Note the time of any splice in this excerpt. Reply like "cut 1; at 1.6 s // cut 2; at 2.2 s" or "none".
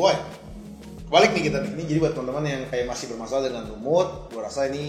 cut 1; at 1.8 s